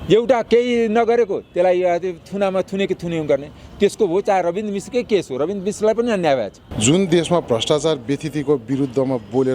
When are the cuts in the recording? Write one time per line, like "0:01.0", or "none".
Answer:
0:06.6